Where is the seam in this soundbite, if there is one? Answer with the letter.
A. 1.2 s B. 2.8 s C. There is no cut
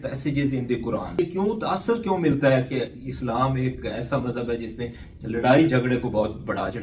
A